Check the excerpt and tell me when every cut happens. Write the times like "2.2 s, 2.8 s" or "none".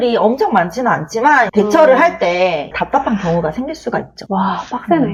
none